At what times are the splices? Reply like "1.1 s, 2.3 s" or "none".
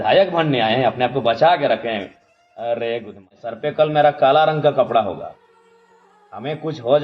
3.6 s